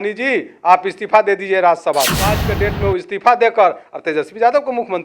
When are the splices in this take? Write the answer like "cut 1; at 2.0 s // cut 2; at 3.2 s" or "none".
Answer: cut 1; at 2.5 s